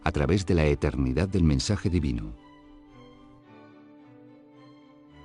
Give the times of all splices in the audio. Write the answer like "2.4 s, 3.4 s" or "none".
3.1 s